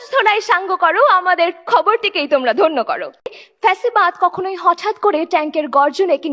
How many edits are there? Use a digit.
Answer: 1